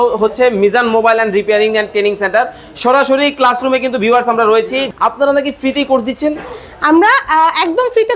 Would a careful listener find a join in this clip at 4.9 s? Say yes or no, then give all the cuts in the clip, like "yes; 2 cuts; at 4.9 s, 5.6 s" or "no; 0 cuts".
yes; 1 cut; at 4.9 s